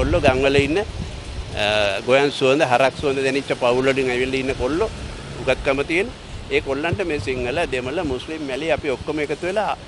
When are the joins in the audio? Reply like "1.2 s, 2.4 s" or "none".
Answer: none